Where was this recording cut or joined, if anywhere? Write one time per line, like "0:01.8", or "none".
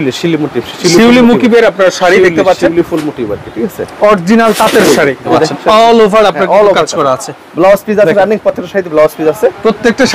0:05.2